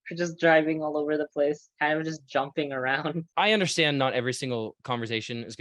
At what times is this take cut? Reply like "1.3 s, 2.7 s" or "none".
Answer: 3.3 s

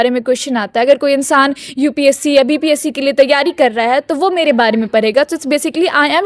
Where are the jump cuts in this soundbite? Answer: none

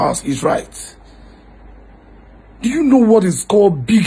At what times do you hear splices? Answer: none

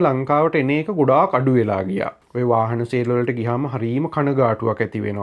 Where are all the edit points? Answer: 2.2 s

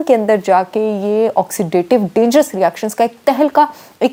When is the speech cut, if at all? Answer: none

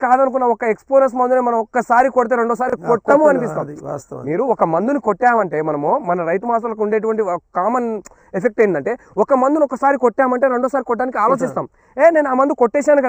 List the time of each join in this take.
none

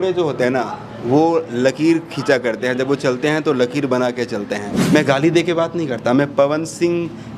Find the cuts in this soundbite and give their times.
4.8 s

